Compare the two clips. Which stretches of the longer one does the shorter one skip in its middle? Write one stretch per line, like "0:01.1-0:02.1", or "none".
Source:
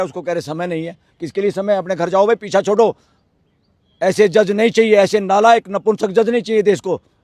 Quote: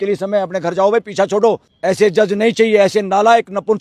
0:03.0-0:03.9